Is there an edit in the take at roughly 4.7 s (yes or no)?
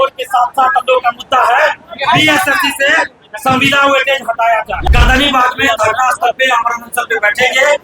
yes